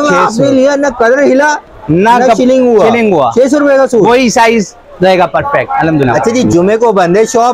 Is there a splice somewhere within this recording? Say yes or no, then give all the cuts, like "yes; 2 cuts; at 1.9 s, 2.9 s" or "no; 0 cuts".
yes; 1 cut; at 6.1 s